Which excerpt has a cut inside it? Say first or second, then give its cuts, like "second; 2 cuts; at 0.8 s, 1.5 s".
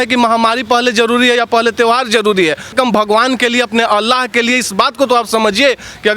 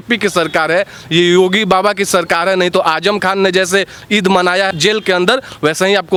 first; 1 cut; at 2.7 s